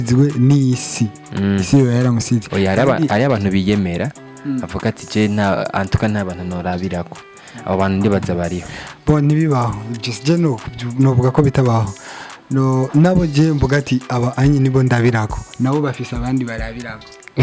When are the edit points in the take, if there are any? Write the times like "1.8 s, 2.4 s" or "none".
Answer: none